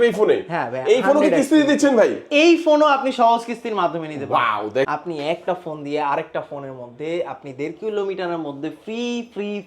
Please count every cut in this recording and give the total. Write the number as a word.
one